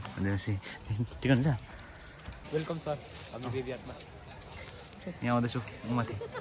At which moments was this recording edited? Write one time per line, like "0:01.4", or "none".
0:02.3